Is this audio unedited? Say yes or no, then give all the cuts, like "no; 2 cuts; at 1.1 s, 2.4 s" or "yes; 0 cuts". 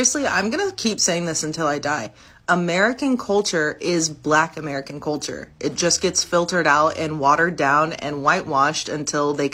yes; 0 cuts